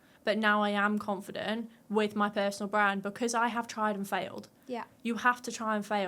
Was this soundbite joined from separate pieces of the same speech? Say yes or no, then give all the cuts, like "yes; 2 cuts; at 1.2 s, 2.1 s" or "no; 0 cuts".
no; 0 cuts